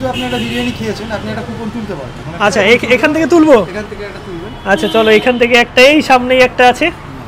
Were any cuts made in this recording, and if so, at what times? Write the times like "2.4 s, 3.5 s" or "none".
none